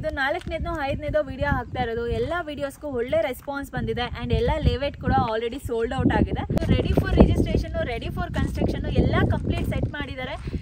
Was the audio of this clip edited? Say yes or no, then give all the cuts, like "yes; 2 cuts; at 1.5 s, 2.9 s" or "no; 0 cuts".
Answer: yes; 1 cut; at 6.6 s